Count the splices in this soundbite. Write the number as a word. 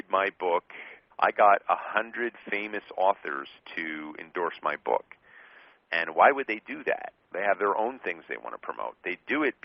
one